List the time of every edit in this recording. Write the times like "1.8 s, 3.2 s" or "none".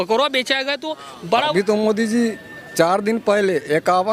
1.5 s